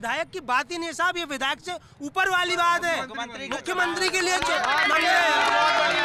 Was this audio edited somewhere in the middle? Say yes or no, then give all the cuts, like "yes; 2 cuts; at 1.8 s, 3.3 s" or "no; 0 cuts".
no; 0 cuts